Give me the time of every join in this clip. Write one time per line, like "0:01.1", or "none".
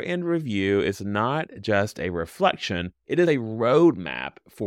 0:02.9